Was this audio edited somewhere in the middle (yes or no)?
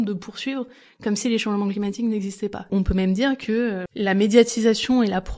yes